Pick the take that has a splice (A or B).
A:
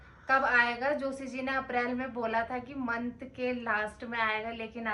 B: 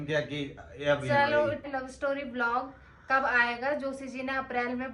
B